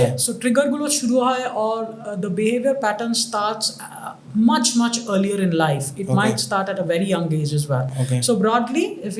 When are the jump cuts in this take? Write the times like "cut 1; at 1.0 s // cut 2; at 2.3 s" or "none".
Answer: none